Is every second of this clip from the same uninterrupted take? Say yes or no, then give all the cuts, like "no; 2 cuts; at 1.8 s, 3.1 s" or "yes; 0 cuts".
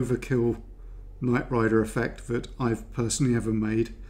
yes; 0 cuts